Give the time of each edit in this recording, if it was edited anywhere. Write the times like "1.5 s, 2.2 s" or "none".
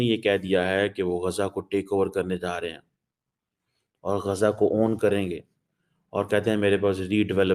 none